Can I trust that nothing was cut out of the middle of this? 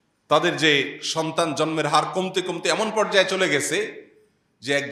yes; 0 cuts

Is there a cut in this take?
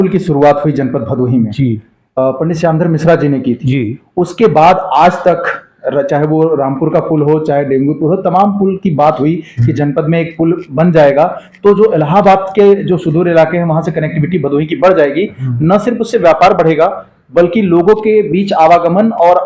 no; 0 cuts

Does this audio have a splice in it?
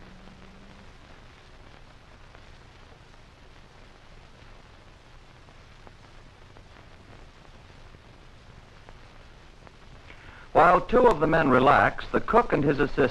no; 0 cuts

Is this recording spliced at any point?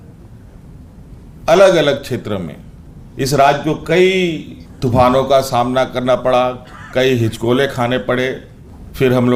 no; 0 cuts

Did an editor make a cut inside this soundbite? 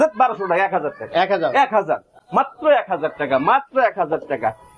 no; 0 cuts

